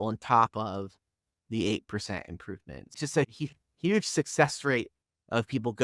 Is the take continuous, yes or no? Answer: no